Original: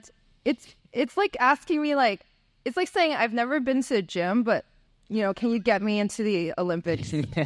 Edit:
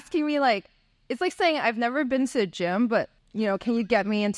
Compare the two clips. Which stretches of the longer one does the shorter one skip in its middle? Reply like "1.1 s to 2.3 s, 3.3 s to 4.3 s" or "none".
4.8 s to 5.0 s